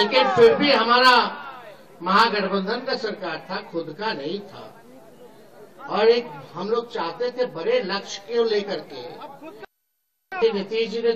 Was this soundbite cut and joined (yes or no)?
no